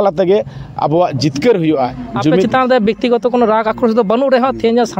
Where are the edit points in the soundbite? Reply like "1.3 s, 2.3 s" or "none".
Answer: 2.5 s